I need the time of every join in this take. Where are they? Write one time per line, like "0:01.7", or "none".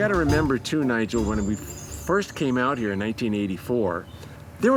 none